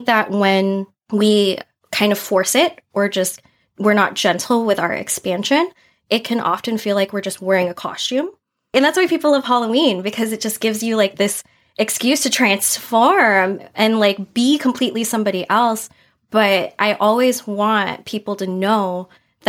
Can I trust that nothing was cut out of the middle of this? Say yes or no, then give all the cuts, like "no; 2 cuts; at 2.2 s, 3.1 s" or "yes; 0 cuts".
no; 2 cuts; at 0.9 s, 8.7 s